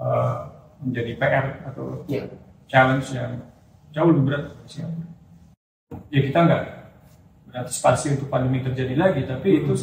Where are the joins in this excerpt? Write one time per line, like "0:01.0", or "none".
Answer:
0:05.7